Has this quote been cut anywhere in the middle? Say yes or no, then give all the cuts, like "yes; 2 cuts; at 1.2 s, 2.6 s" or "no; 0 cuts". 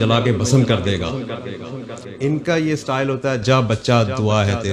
yes; 1 cut; at 2.1 s